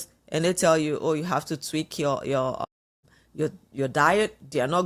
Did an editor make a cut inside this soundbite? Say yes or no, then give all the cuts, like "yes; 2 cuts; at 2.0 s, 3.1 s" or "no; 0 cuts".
no; 0 cuts